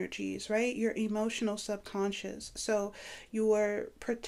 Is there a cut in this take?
no; 0 cuts

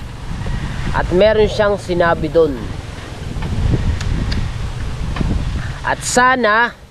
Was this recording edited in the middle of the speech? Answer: no; 0 cuts

